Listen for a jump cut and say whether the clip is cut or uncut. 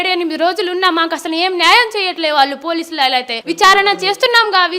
cut